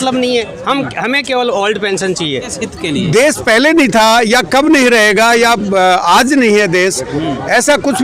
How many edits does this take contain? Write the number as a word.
one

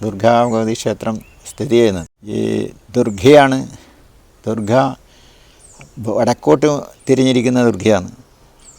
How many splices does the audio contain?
one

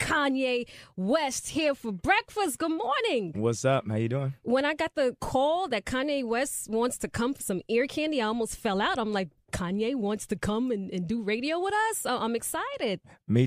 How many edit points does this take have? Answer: one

